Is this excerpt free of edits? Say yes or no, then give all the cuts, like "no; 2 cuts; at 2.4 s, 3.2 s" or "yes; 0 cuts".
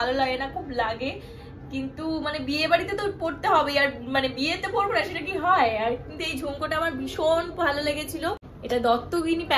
no; 1 cut; at 8.5 s